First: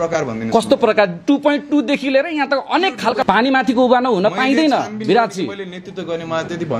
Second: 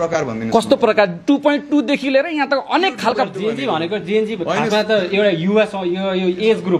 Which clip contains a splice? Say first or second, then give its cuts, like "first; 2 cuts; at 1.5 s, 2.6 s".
first; 1 cut; at 3.2 s